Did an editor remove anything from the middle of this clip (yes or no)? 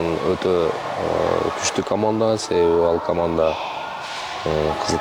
no